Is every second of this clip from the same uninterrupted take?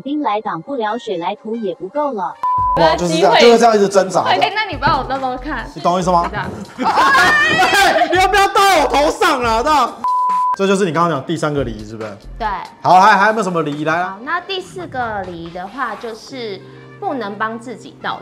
yes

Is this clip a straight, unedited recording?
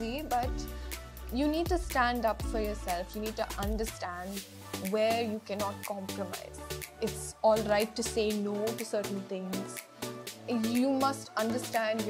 yes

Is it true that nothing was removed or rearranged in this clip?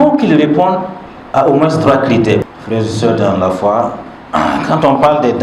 no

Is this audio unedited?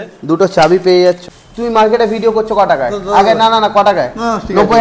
no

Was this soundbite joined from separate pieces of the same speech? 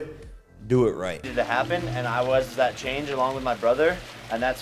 yes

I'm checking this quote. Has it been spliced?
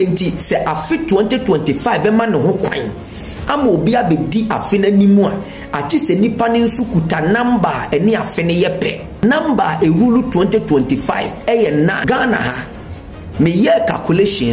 yes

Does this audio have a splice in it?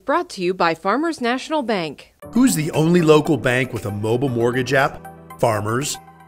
no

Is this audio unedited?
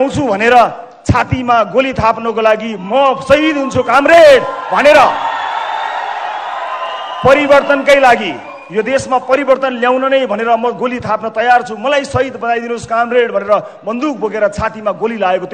yes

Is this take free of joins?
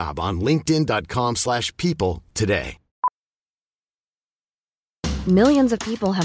no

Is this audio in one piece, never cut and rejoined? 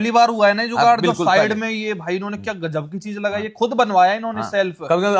yes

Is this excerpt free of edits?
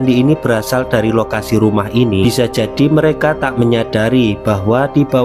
no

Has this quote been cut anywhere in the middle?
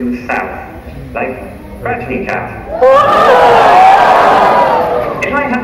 no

